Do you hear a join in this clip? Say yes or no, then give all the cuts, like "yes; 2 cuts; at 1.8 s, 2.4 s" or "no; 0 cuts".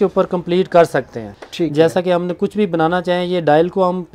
yes; 1 cut; at 1.4 s